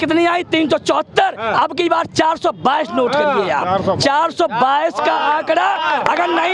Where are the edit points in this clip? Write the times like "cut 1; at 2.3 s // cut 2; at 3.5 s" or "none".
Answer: none